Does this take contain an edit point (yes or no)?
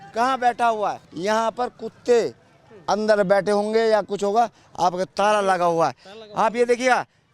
yes